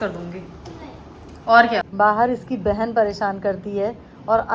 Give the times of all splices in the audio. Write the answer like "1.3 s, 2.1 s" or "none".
1.9 s